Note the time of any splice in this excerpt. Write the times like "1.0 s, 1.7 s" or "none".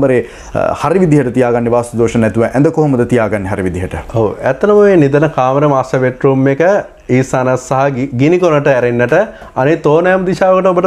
none

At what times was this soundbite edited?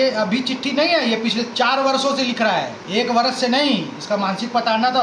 2.8 s

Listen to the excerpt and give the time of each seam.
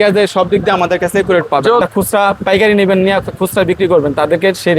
1.8 s

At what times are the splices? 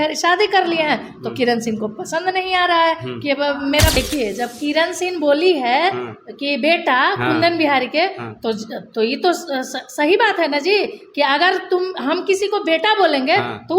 4.0 s

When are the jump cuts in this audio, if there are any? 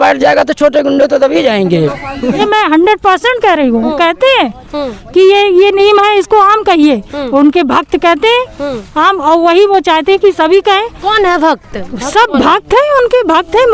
2.4 s

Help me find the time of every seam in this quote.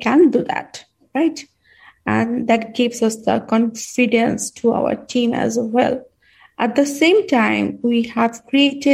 none

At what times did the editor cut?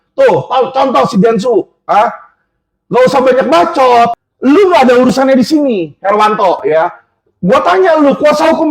4.2 s

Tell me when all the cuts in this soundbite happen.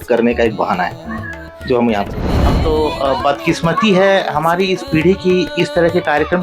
2.6 s

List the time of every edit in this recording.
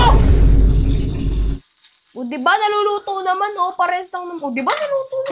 1.6 s

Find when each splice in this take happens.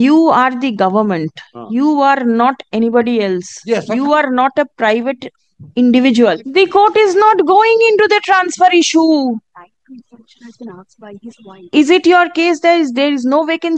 6.4 s, 11.6 s

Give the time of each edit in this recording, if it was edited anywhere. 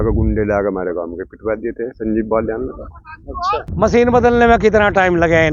3.6 s

